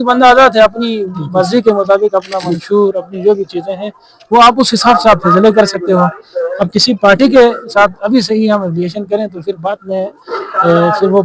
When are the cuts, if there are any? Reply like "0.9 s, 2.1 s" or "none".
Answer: none